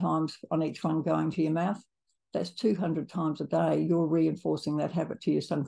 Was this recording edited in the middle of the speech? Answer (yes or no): no